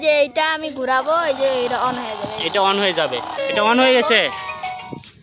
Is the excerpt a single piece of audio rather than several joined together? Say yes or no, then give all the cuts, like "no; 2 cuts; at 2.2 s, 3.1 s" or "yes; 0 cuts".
no; 1 cut; at 3.4 s